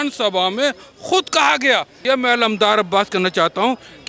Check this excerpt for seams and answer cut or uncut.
cut